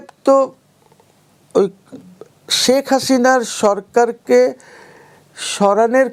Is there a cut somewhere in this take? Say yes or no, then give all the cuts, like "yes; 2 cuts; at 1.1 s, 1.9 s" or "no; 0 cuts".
no; 0 cuts